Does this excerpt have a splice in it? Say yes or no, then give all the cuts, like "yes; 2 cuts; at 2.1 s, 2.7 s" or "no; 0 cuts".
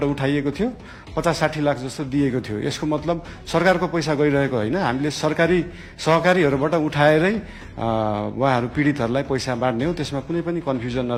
no; 0 cuts